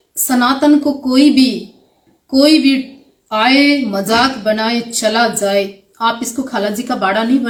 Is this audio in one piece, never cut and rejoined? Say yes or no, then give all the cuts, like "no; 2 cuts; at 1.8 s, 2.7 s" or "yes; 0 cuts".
yes; 0 cuts